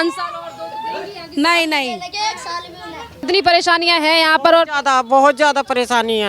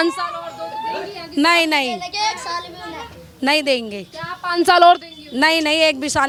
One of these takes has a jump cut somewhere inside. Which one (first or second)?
first